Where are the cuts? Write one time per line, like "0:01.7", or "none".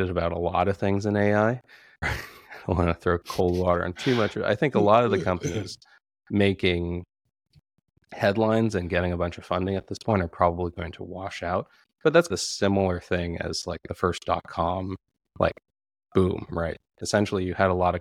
0:02.1